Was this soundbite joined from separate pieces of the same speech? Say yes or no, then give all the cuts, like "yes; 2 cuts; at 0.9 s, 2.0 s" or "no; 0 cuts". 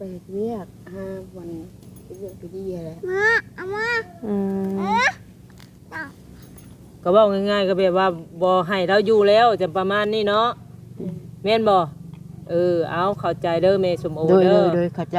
no; 0 cuts